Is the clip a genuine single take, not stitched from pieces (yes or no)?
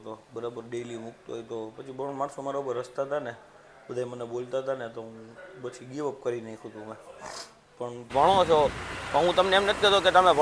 no